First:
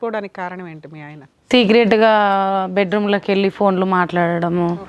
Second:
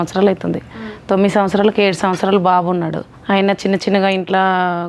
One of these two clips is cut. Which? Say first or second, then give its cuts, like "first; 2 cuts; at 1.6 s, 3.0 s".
second; 1 cut; at 3.1 s